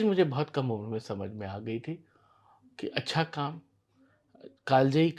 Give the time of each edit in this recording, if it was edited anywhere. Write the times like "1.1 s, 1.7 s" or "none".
none